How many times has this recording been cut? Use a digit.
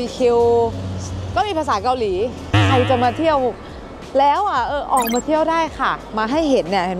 1